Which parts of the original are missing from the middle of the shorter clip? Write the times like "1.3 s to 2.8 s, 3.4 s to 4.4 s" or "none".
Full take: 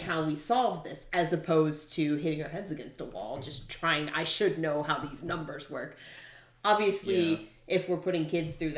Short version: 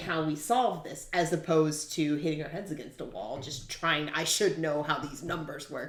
none

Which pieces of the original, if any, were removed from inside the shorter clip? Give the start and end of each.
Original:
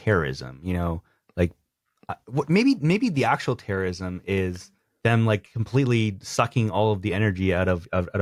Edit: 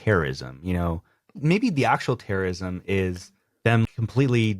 1.4 s to 2.8 s, 5.2 s to 5.4 s

